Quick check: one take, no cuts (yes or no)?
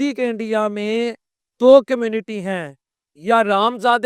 yes